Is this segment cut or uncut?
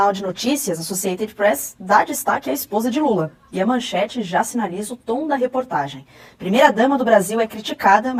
uncut